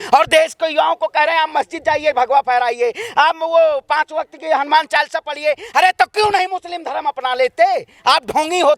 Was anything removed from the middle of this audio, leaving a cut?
no; 0 cuts

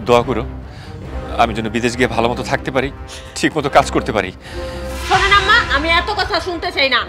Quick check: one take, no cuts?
no; 1 cut; at 4.9 s

